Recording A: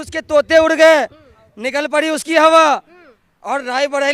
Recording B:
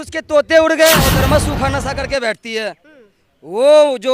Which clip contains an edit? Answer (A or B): B